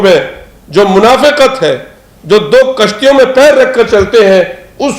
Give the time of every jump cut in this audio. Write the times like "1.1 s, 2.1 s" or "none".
none